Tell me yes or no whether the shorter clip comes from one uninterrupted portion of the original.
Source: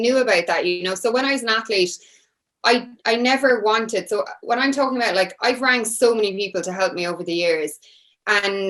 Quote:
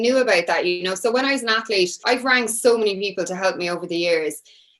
no